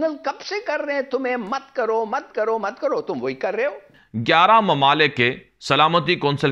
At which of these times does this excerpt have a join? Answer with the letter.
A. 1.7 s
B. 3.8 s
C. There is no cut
B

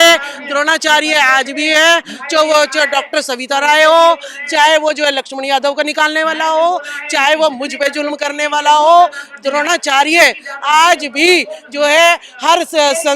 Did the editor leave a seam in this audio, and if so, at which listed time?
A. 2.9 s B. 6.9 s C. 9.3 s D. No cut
D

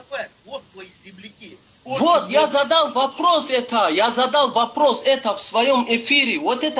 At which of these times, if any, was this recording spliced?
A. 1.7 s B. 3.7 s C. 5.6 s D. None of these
D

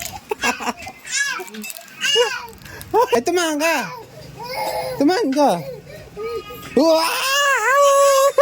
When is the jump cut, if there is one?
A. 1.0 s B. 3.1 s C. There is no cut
B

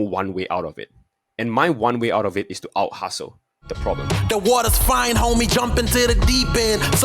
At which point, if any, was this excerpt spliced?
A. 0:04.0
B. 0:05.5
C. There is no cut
A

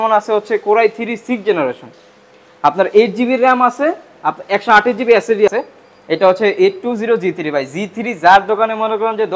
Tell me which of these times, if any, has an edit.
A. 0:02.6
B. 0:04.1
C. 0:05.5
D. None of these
C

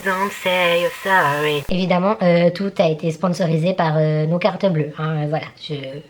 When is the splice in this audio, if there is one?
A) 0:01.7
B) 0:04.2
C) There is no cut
A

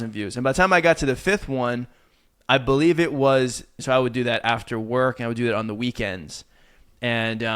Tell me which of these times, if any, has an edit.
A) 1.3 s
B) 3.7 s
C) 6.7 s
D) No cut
B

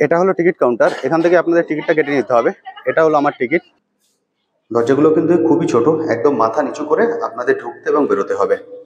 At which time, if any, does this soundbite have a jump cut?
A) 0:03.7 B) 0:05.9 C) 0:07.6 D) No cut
A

